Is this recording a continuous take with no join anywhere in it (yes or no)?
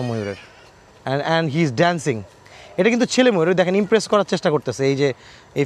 yes